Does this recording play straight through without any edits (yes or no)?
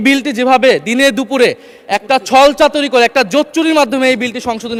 yes